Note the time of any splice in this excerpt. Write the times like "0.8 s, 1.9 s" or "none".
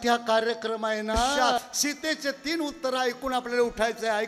1.4 s